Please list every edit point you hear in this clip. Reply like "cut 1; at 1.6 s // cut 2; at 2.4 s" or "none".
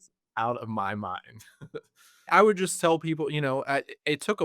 cut 1; at 2.3 s